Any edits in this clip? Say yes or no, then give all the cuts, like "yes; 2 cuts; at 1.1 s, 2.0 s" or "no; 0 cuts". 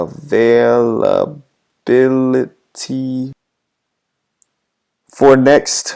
yes; 1 cut; at 3.5 s